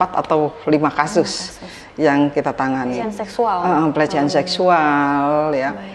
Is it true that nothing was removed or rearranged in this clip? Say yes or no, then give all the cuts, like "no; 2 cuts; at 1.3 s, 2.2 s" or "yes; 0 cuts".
no; 1 cut; at 3.2 s